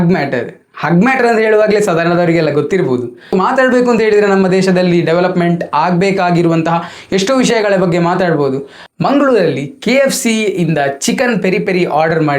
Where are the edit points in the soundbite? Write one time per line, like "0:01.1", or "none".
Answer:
0:03.3
0:08.8